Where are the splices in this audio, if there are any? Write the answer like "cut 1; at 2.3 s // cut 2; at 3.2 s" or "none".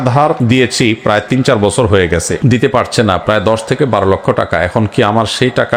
none